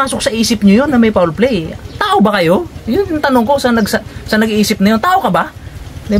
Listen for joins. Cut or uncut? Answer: uncut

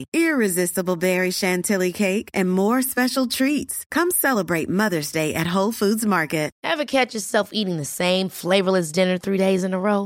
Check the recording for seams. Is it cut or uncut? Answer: cut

